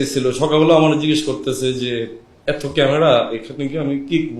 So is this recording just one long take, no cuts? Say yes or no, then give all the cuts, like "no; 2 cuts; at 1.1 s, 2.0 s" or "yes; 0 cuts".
no; 1 cut; at 2.2 s